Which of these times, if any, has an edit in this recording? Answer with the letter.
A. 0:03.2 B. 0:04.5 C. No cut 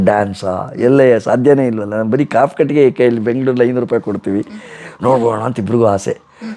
C